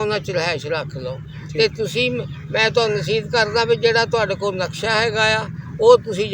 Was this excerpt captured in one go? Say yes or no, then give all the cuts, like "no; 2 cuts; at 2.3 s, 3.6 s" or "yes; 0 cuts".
yes; 0 cuts